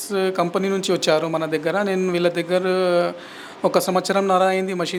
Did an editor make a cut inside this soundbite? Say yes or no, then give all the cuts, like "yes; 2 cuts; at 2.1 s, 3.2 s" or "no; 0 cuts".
no; 0 cuts